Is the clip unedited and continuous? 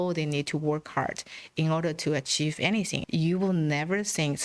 no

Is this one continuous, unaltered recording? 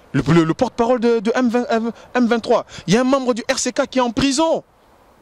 yes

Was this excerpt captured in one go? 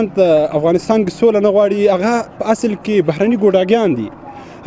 yes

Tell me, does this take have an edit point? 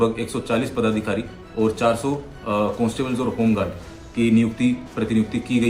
no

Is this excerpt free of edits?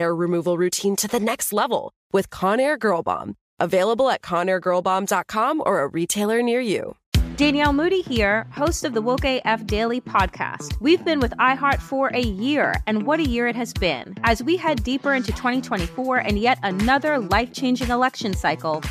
no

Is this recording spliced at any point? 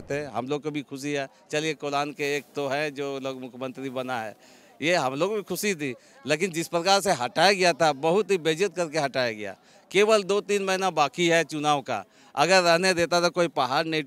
no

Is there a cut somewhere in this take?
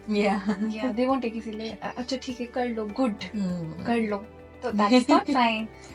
no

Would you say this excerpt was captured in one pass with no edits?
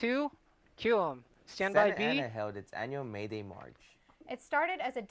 yes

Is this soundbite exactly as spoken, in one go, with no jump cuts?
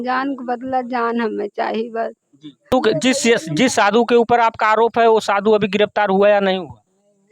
no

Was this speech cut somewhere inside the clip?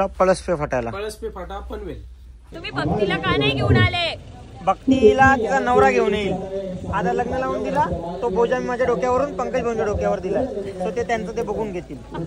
yes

